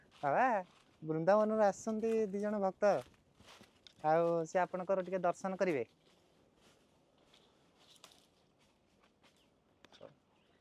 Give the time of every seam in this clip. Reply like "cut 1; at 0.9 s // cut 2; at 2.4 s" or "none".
none

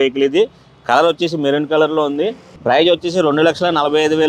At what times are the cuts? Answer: cut 1; at 2.4 s

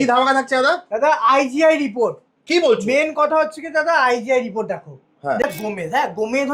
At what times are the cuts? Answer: cut 1; at 5.4 s

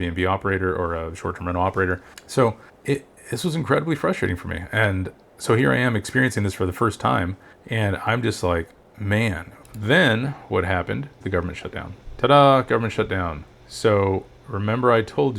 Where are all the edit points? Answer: cut 1; at 2.1 s // cut 2; at 9.6 s

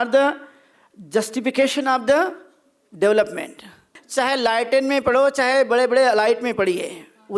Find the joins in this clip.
cut 1; at 4.0 s

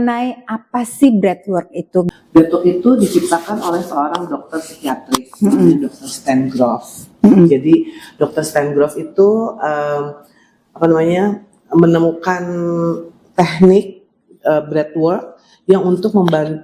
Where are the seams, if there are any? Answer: cut 1; at 2.1 s

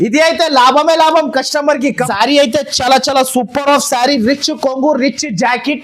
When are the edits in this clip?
cut 1; at 2.0 s

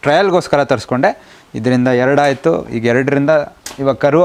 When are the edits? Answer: none

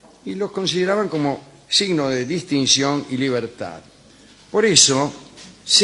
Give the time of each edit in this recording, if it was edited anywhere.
cut 1; at 4.4 s

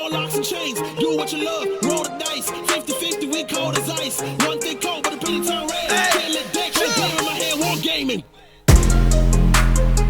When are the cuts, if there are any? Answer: cut 1; at 8.1 s

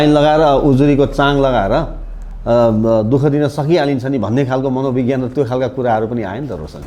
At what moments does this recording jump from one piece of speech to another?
none

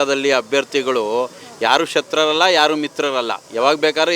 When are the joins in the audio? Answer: none

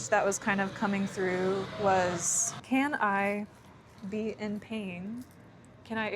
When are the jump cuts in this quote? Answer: cut 1; at 2.6 s

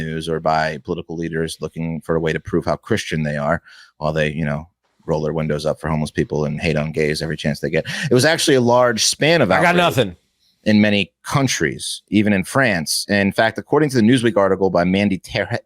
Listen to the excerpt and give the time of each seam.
none

